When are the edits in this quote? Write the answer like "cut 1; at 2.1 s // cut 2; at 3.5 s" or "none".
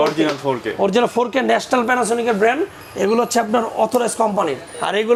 none